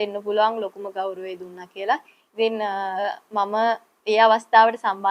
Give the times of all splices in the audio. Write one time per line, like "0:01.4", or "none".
none